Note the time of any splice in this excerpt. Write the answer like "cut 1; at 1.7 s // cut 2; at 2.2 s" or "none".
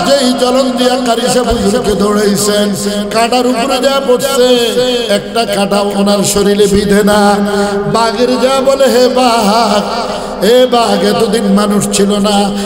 none